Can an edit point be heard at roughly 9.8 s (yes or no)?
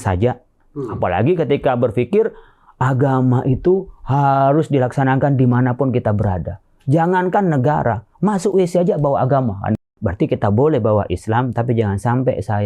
yes